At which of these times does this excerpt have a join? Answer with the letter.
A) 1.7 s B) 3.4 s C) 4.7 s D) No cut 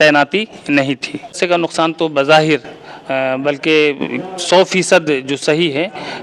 A